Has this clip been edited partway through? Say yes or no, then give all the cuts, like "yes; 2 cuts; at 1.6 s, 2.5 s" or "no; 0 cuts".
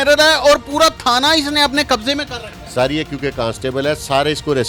no; 0 cuts